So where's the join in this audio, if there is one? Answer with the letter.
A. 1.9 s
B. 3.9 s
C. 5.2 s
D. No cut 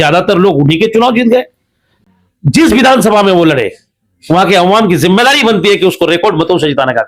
A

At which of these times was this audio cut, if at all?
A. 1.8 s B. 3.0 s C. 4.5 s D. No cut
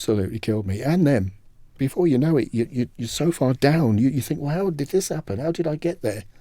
A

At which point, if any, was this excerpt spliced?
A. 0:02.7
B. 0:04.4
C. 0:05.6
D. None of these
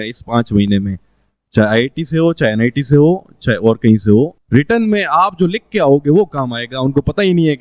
B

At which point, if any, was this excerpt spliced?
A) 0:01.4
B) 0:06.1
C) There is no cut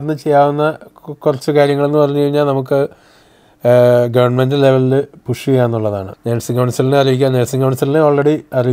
B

